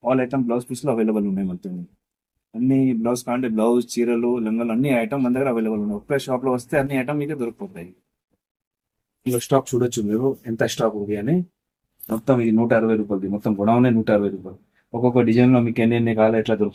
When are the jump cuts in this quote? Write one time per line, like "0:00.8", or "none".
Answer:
none